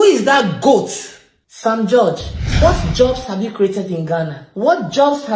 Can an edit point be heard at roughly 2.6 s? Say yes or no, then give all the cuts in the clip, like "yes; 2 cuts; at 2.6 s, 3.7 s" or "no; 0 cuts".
yes; 1 cut; at 2.6 s